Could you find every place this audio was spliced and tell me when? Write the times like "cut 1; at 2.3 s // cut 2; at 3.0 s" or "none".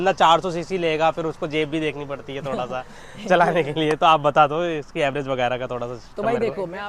none